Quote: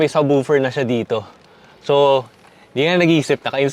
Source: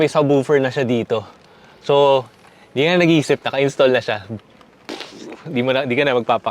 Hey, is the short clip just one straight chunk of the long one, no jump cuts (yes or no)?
yes